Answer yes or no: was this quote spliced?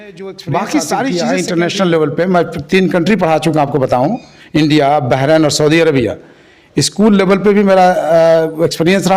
yes